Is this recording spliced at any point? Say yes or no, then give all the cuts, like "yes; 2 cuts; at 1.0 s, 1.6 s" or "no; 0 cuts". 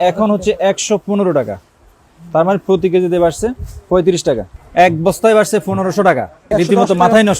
yes; 2 cuts; at 4.6 s, 6.4 s